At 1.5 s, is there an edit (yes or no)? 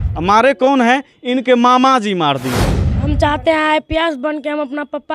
no